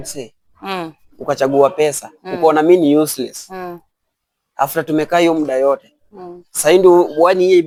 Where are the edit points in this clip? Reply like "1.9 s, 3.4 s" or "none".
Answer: none